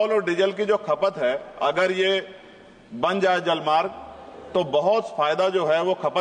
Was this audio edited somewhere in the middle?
no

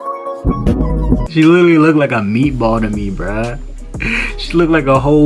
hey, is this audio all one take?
no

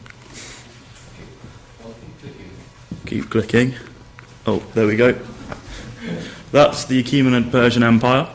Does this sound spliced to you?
no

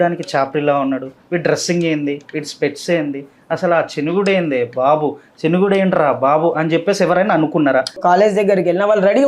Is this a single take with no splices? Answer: no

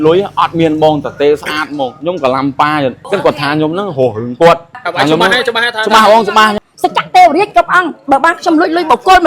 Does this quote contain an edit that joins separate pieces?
yes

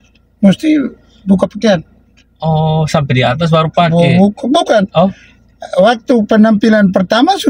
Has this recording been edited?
no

